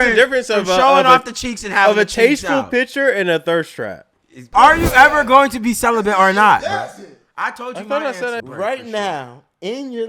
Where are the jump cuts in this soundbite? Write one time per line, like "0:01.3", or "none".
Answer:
0:04.5
0:08.4